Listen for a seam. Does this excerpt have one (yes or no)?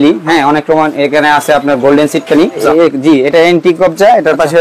yes